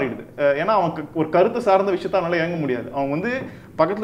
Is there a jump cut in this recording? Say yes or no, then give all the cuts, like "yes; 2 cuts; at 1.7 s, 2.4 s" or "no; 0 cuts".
no; 0 cuts